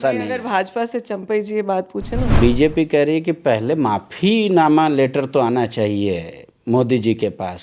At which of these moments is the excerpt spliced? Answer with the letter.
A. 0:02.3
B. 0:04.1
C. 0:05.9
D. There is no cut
A